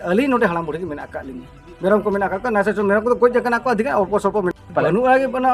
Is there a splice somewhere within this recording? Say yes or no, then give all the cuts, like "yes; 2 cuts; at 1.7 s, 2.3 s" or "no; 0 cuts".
yes; 1 cut; at 4.6 s